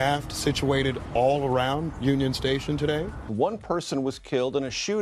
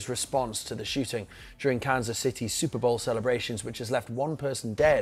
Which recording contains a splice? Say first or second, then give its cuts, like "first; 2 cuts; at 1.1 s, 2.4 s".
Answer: first; 1 cut; at 3.2 s